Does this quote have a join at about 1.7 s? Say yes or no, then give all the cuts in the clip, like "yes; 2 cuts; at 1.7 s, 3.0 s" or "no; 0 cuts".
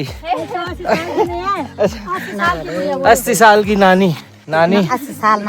no; 1 cut; at 4.3 s